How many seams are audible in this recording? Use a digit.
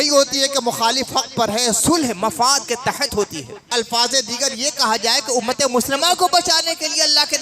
1